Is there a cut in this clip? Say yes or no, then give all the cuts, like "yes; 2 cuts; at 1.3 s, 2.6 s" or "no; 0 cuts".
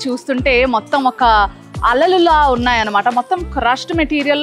no; 0 cuts